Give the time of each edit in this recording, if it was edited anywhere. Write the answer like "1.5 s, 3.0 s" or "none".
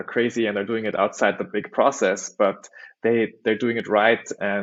none